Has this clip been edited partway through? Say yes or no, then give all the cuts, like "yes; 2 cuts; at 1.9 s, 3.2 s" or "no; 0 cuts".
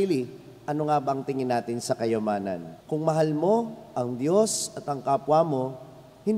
yes; 1 cut; at 2.7 s